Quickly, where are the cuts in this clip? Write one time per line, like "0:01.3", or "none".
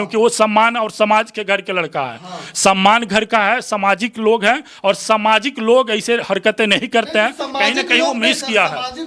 none